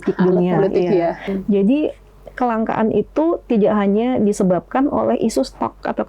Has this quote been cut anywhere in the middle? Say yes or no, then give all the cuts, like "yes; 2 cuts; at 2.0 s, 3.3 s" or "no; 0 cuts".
yes; 1 cut; at 1.3 s